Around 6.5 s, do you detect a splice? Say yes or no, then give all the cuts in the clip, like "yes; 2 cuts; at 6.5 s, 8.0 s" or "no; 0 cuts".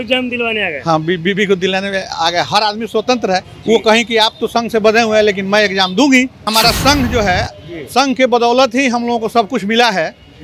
yes; 1 cut; at 6.5 s